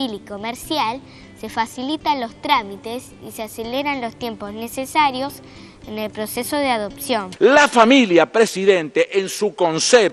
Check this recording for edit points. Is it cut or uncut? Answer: cut